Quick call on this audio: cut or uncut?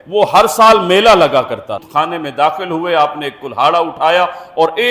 cut